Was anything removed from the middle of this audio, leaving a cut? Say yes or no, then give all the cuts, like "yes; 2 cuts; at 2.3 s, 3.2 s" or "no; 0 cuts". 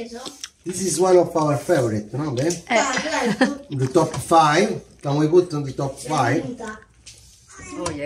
no; 0 cuts